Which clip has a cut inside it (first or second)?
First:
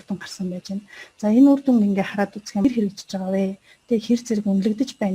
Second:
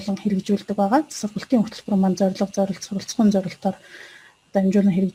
first